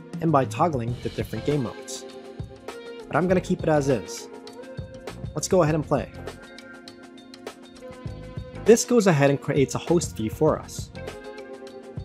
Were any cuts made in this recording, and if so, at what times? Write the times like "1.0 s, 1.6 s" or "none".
none